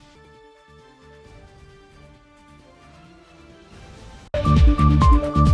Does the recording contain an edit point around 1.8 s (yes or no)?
no